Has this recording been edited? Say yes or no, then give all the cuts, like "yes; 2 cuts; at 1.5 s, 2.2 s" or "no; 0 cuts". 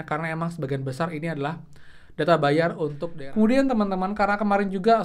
yes; 1 cut; at 3.1 s